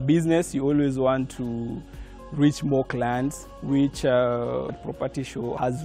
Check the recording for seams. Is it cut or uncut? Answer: cut